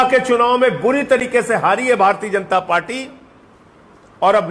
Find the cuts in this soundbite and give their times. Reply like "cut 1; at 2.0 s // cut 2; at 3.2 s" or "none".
none